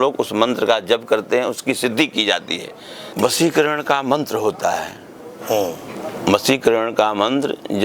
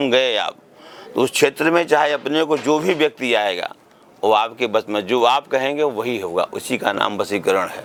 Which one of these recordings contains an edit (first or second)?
first